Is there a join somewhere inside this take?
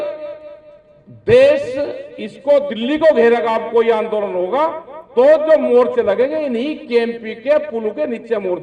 no; 0 cuts

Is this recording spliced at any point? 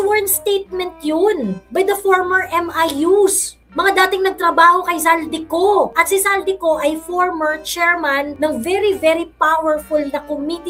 no; 0 cuts

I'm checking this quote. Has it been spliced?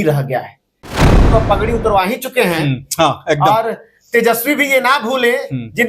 yes; 1 cut; at 1.1 s

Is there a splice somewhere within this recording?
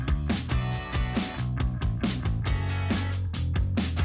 yes; 1 cut; at 1.6 s

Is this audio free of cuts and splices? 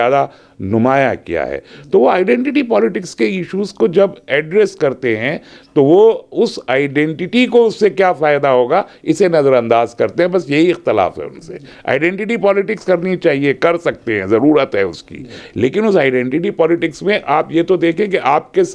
yes; 0 cuts

